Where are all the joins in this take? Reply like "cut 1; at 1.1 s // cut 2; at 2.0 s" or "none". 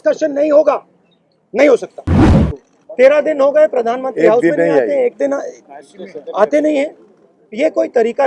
cut 1; at 2.3 s